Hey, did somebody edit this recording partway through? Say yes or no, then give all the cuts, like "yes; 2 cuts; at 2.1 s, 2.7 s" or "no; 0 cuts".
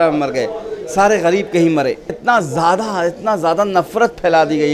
yes; 1 cut; at 2.2 s